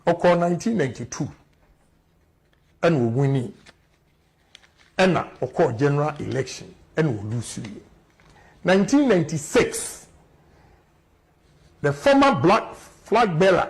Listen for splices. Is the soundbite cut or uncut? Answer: cut